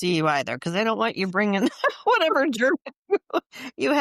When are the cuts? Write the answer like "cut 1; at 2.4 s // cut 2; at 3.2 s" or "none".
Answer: none